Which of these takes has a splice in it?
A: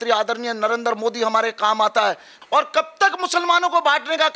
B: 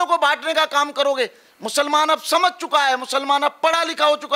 A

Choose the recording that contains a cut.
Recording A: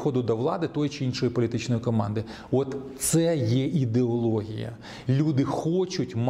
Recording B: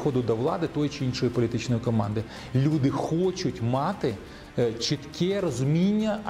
B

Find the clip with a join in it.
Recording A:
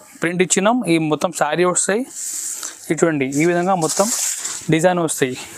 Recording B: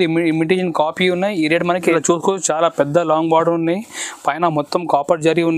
B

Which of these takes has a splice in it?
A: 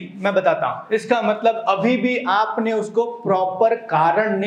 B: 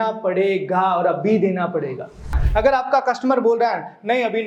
B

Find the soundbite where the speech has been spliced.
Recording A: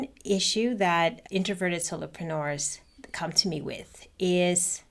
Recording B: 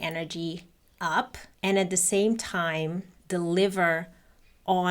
B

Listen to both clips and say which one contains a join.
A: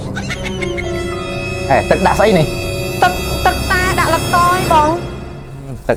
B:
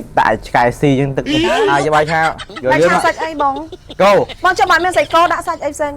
B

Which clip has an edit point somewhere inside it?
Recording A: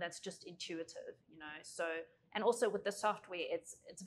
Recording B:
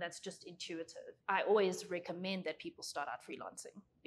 B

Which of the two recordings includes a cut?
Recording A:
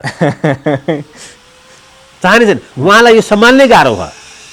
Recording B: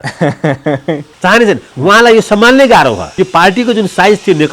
B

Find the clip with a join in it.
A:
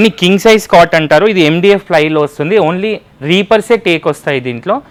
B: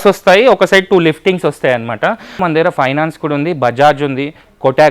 B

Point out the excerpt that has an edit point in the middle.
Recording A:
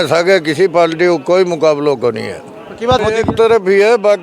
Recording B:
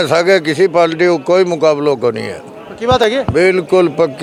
A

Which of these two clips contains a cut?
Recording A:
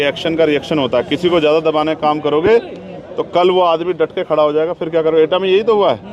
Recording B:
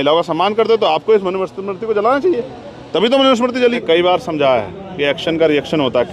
B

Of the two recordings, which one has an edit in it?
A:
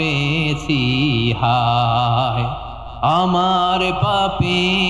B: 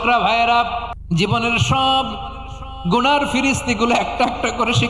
B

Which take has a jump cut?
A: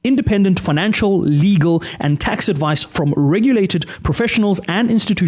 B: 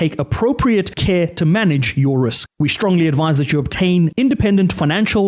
B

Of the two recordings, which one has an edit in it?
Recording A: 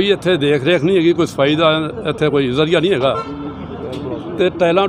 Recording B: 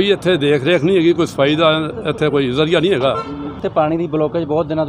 B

